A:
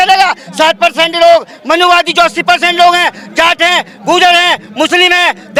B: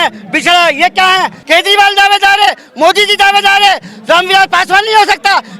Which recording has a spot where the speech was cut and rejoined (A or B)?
B